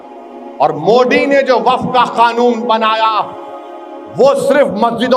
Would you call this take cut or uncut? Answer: uncut